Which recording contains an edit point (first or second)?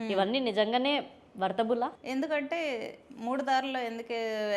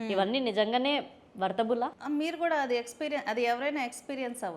first